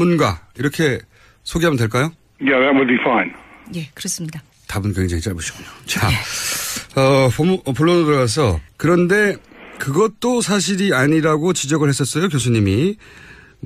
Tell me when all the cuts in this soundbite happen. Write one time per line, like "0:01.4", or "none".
none